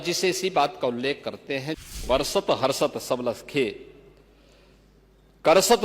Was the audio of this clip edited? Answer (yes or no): yes